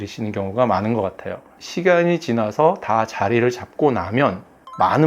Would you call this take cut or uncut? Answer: cut